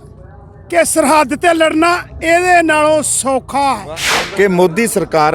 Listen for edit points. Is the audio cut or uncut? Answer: cut